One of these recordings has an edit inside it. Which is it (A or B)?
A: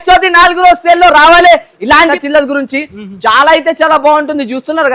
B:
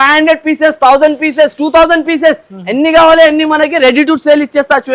A